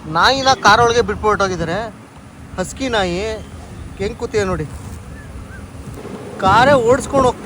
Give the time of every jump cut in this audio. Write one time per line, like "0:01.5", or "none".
0:06.0